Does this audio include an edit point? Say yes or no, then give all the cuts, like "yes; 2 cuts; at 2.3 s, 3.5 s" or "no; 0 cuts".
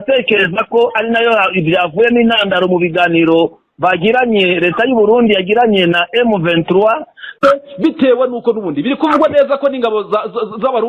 yes; 1 cut; at 7.3 s